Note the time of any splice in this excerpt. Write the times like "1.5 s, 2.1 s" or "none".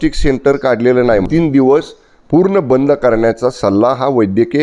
1.2 s